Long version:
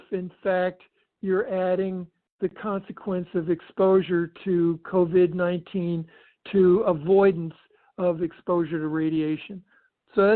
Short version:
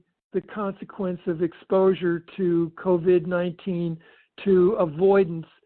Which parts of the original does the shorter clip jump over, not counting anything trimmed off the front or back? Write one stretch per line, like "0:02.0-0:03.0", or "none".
none